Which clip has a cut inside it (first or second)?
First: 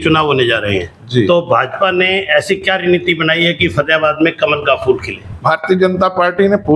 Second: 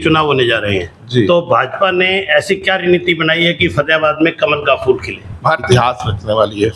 second